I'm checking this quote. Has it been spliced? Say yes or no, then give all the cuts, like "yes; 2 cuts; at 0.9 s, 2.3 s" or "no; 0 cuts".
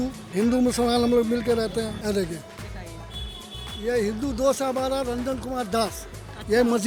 no; 0 cuts